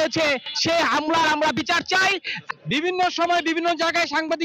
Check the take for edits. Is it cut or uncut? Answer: cut